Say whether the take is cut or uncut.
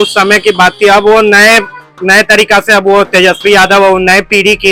uncut